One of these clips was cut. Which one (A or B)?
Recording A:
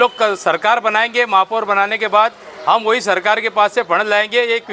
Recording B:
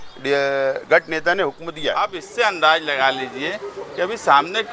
B